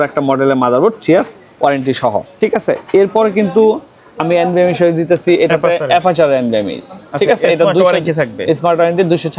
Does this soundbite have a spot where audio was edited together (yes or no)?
no